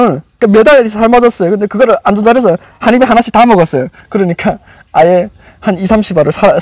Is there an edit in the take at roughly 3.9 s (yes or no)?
no